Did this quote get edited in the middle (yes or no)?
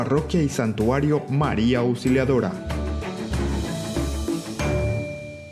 yes